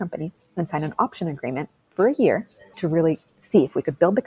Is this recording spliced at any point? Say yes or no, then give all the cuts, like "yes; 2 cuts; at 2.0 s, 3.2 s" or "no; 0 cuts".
yes; 1 cut; at 2.7 s